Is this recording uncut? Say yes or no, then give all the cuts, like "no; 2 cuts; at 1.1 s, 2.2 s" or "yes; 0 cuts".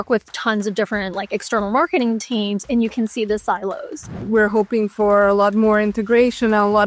no; 1 cut; at 4.1 s